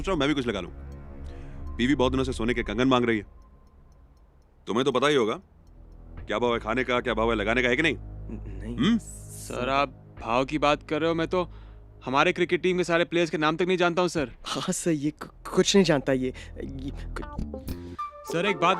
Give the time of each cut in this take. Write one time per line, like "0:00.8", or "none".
0:17.2